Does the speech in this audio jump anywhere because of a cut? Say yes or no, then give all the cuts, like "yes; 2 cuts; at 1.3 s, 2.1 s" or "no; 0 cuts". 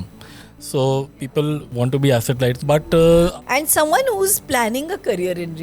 yes; 3 cuts; at 1.7 s, 2.6 s, 3.3 s